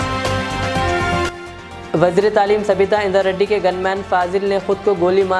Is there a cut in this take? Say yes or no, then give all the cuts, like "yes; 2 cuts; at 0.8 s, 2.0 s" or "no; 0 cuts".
no; 0 cuts